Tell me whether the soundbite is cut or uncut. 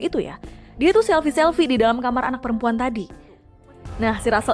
cut